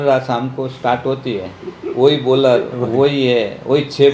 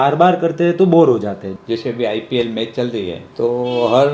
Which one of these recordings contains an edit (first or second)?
second